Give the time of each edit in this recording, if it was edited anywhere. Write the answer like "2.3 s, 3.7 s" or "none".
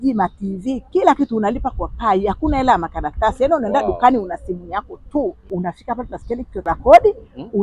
5.4 s, 6.7 s